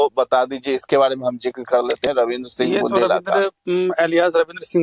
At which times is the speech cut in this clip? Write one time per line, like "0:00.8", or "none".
0:02.0